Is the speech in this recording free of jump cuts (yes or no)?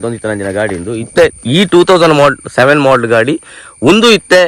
yes